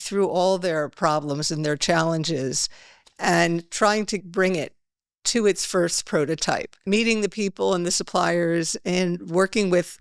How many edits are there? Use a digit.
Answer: 2